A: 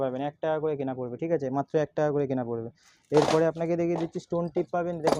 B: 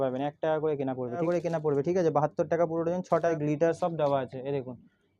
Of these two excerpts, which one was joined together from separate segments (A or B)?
B